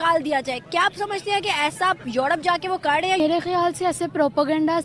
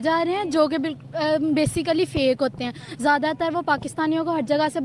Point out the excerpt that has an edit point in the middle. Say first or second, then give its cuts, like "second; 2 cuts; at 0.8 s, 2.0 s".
first; 1 cut; at 3.2 s